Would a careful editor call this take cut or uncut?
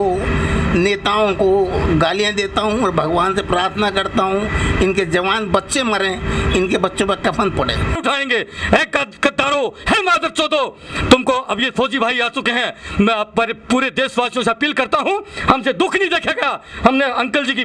cut